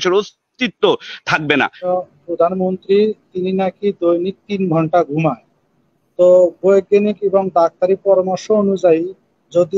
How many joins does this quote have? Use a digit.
1